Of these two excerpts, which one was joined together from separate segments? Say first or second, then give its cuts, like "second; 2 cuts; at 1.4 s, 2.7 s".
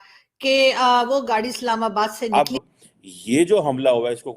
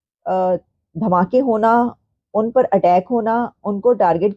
first; 1 cut; at 2.3 s